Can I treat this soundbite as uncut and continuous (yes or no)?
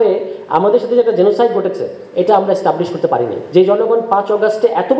no